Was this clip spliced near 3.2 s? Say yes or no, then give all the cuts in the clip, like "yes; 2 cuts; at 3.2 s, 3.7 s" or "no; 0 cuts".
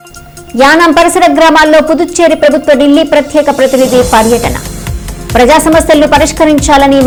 no; 0 cuts